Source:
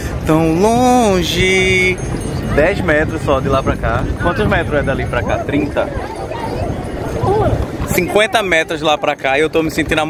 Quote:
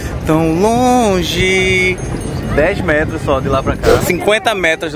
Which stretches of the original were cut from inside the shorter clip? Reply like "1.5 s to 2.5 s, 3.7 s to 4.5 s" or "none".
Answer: 4.0 s to 7.9 s